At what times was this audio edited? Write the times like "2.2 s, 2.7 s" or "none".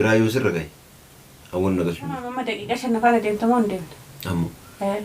2.5 s